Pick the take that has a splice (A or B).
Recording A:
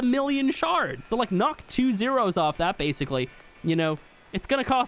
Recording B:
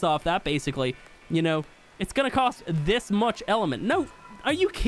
A